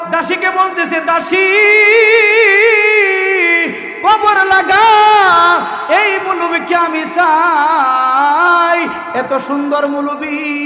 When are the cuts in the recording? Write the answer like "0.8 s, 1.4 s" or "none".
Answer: none